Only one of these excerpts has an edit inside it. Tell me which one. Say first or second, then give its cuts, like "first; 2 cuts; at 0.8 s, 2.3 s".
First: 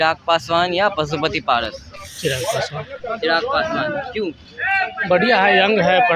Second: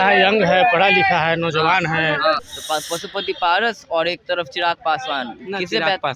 second; 1 cut; at 2.5 s